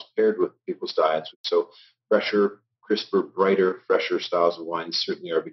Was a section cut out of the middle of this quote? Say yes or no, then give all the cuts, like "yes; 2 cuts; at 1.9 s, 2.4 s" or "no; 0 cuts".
yes; 1 cut; at 1.3 s